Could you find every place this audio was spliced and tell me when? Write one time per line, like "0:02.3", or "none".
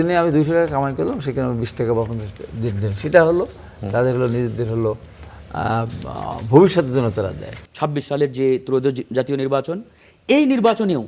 0:07.5